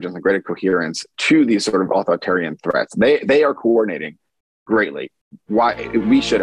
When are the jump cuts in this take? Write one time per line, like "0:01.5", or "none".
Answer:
none